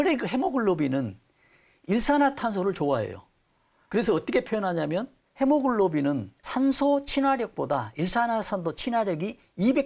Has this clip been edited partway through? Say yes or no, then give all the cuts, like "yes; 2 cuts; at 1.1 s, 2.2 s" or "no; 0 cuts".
yes; 2 cuts; at 5.2 s, 6.4 s